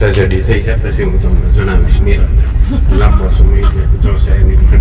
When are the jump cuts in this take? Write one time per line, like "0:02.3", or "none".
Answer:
none